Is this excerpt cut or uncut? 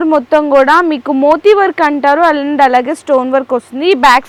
uncut